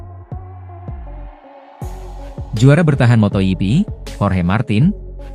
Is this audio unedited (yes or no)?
no